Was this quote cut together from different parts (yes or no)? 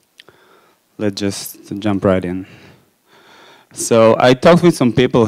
yes